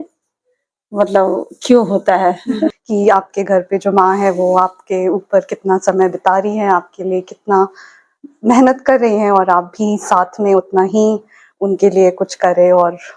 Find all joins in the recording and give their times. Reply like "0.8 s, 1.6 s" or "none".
2.7 s